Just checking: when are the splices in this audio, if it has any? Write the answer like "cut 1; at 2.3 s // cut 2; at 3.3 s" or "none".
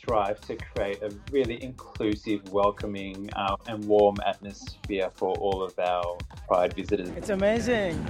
cut 1; at 7.2 s